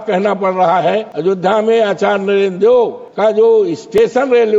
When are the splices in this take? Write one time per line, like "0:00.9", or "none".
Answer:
0:01.1
0:03.0